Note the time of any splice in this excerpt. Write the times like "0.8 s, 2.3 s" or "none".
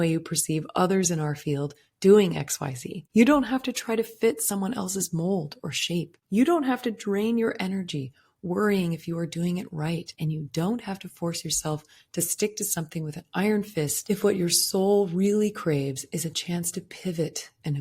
10.1 s, 14.0 s